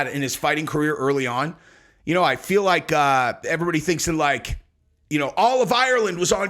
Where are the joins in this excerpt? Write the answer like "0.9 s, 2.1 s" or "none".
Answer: 3.4 s

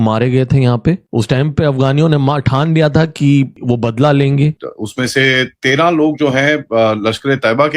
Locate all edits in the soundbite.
4.6 s

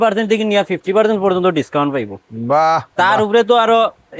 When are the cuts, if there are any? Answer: none

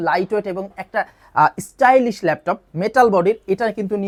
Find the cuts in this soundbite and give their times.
none

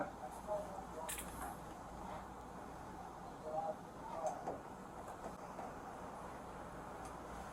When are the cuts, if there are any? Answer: 5.4 s

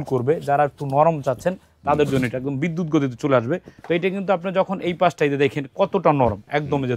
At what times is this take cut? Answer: 3.7 s

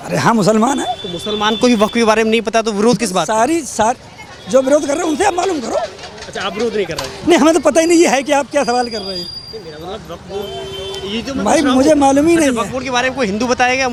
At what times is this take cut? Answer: none

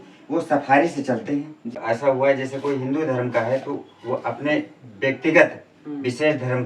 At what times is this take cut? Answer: 1.8 s

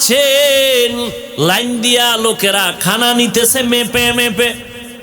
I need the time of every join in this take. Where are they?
1.2 s

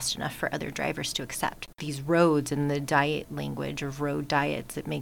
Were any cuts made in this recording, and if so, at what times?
1.8 s

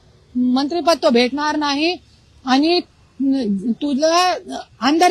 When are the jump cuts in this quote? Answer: none

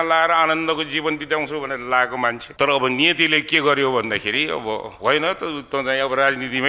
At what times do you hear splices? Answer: 2.4 s

